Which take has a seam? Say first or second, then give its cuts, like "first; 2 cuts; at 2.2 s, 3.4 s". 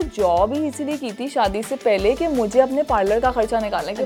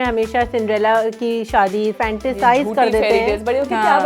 second; 1 cut; at 1.9 s